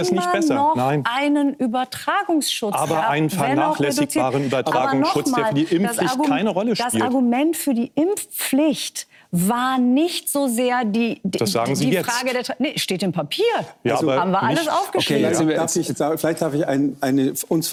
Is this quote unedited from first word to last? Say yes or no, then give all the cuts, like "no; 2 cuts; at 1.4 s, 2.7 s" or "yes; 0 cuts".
yes; 0 cuts